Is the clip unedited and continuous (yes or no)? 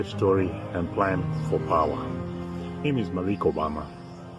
no